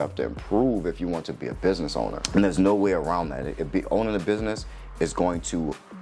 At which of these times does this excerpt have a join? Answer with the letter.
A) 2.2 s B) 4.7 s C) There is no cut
A